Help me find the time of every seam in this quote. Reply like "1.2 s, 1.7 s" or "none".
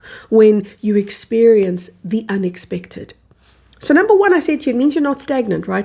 none

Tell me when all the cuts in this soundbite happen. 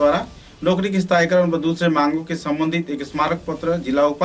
none

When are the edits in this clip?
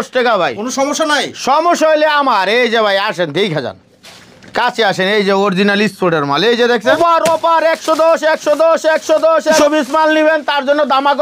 6.9 s, 9.6 s

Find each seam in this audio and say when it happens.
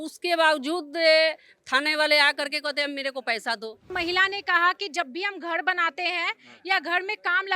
3.9 s

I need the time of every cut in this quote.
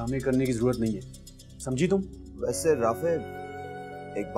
2.2 s

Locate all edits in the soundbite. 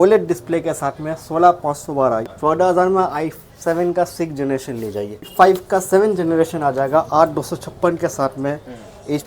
2.2 s, 5.3 s

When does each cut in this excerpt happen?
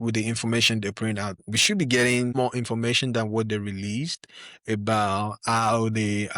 1.4 s, 2.3 s

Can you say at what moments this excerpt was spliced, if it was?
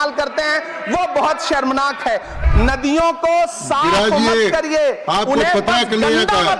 2.4 s

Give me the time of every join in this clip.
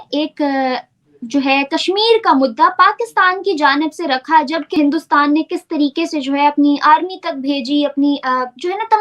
4.7 s

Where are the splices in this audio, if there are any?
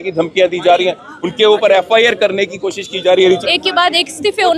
3.4 s

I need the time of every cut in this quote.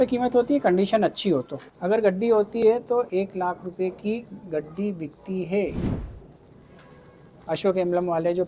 1.7 s, 5.9 s

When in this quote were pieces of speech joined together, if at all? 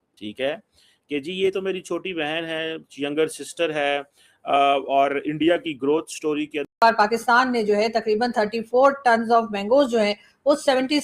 6.7 s

